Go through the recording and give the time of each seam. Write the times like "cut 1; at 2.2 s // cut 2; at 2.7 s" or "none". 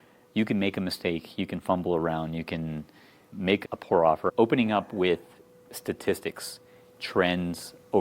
cut 1; at 4.3 s